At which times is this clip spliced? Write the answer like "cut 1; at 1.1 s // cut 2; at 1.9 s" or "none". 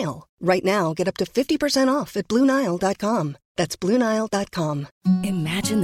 cut 1; at 4.9 s

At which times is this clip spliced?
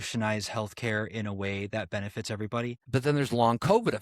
cut 1; at 2.8 s

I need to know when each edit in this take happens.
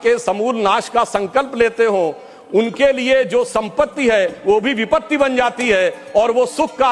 none

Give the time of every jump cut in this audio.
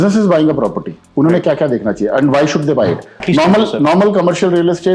cut 1; at 3.1 s

